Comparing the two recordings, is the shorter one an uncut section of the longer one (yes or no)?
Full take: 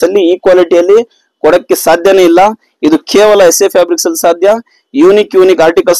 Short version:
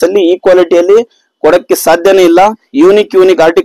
no